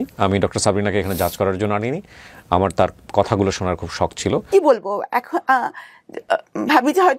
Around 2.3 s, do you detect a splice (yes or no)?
no